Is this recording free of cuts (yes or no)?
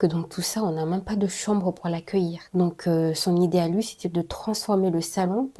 yes